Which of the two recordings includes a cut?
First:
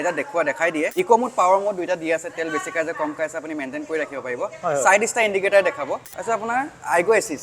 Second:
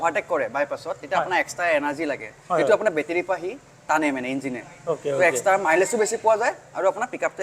first; 2 cuts; at 0.9 s, 6.0 s

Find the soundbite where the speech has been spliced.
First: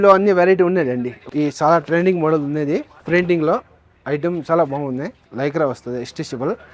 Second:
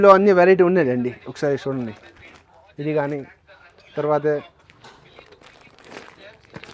first; 2 cuts; at 1.3 s, 5.2 s

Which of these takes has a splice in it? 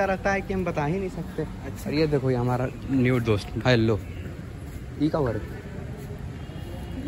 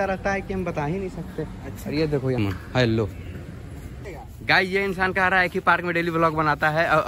second; 2 cuts; at 2.5 s, 3.9 s

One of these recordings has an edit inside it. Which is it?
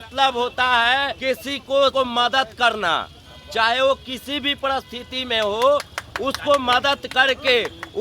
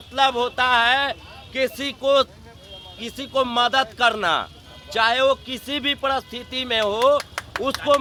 first; 2 cuts; at 1.1 s, 1.9 s

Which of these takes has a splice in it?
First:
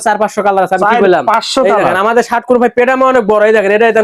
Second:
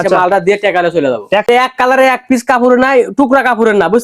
second; 1 cut; at 1.5 s

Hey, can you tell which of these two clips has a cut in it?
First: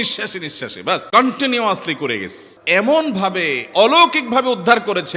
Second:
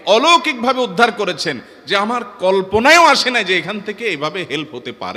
first; 2 cuts; at 1.2 s, 2.6 s

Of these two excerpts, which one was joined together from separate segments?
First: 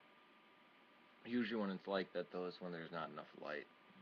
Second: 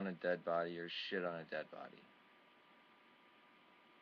first; 1 cut; at 1.4 s

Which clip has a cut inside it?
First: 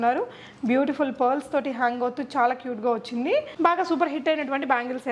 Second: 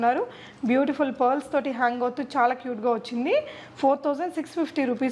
first; 1 cut; at 3.5 s

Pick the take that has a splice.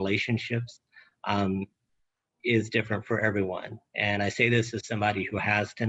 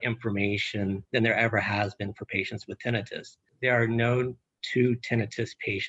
second; 2 cuts; at 1.0 s, 3.4 s

